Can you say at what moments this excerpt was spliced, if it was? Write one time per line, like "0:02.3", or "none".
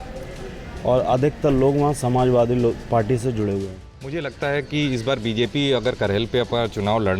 0:03.8